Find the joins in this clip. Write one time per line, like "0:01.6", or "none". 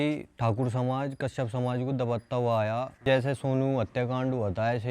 0:03.0